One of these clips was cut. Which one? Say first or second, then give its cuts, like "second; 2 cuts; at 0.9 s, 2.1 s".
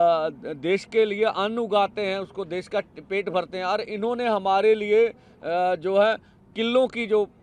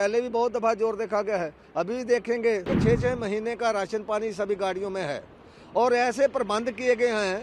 second; 1 cut; at 2.7 s